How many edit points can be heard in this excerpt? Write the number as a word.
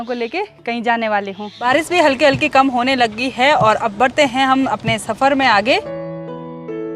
one